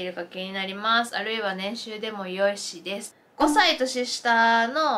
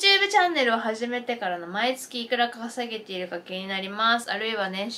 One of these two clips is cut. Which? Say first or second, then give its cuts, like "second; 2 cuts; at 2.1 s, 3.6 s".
first; 1 cut; at 3.2 s